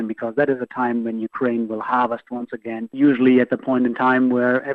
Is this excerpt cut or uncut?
cut